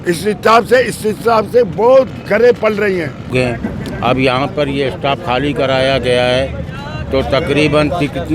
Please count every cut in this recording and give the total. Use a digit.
1